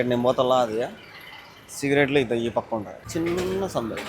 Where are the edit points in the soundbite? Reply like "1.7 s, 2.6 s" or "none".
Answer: 3.0 s